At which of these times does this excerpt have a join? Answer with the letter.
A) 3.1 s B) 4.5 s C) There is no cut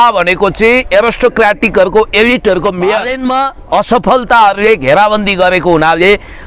A